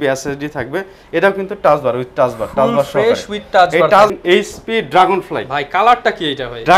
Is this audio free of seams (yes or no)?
no